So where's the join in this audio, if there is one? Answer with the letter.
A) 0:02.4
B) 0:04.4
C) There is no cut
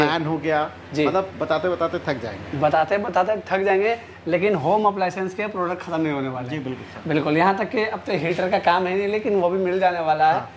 C